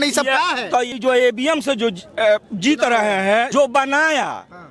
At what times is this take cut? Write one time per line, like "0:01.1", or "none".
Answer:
0:00.9
0:03.5